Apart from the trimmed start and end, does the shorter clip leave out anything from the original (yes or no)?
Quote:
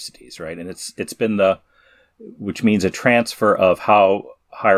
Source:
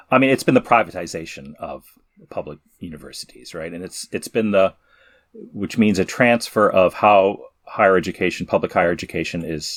no